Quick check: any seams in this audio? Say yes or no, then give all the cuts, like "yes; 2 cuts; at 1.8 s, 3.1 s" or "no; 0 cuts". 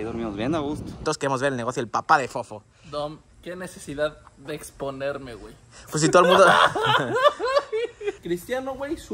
yes; 2 cuts; at 1.0 s, 8.2 s